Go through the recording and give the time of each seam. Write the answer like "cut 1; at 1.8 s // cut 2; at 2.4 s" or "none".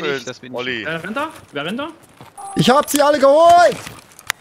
cut 1; at 2.4 s